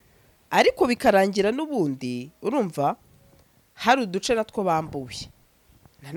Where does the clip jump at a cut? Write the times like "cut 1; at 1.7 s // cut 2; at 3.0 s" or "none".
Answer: none